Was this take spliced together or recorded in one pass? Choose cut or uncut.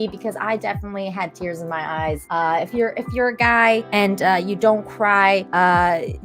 cut